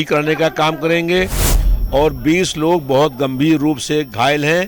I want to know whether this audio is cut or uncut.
cut